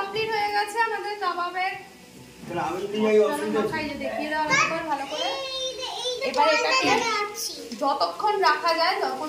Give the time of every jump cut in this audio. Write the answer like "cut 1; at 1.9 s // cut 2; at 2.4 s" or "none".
none

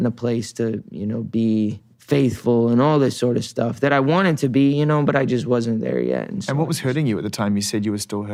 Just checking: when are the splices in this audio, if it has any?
none

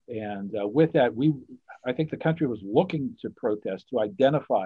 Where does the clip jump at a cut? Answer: none

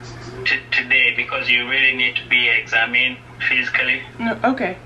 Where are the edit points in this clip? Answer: none

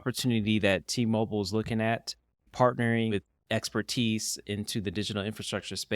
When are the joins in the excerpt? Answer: cut 1; at 2.4 s // cut 2; at 3.1 s

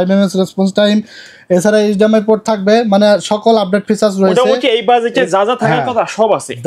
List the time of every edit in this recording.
none

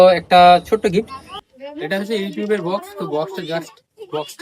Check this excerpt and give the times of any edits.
cut 1; at 1.4 s

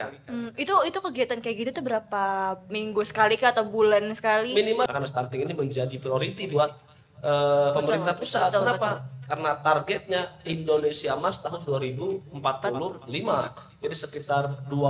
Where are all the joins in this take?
cut 1; at 4.9 s

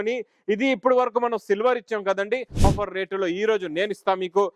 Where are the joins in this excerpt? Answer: cut 1; at 2.6 s

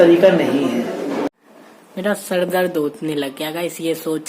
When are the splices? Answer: cut 1; at 1.3 s

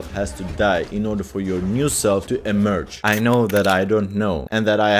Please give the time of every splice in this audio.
cut 1; at 2.6 s

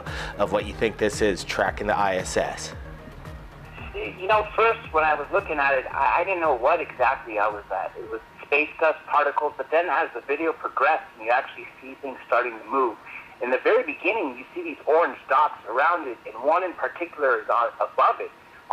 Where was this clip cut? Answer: cut 1; at 1.4 s

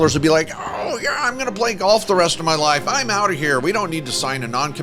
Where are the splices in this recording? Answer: none

